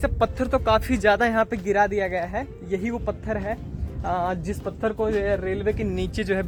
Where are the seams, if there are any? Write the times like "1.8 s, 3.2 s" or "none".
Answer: none